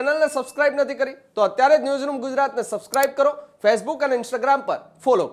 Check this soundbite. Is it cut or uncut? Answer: uncut